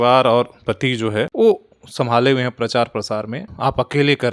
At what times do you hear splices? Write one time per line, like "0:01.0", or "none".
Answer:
0:01.3
0:03.4